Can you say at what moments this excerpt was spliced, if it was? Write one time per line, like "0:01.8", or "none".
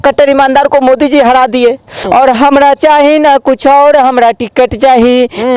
0:02.0